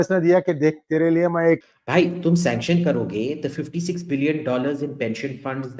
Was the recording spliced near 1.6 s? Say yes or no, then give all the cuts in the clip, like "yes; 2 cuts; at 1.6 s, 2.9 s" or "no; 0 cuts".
yes; 1 cut; at 1.6 s